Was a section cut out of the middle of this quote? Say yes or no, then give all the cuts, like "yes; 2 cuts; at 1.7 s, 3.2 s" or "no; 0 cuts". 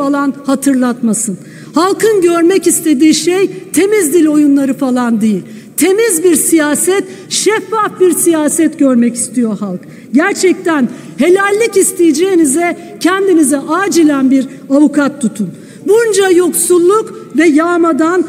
no; 0 cuts